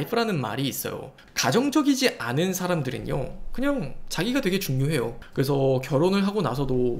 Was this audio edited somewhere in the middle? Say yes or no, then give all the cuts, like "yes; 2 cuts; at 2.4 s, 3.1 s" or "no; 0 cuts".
yes; 1 cut; at 1.2 s